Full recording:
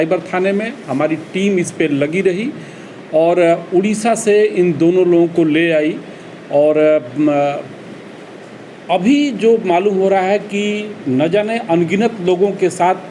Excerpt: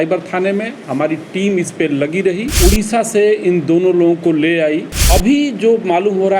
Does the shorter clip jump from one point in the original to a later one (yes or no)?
yes